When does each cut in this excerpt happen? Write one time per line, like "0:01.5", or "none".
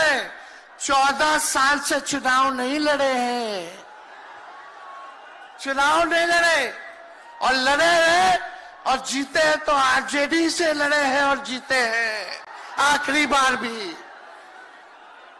none